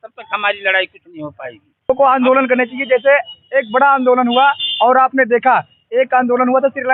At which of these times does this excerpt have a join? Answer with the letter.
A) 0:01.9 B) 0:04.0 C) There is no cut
A